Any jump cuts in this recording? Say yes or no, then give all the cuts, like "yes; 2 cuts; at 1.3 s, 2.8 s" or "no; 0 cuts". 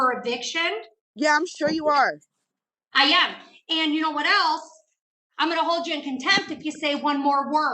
no; 0 cuts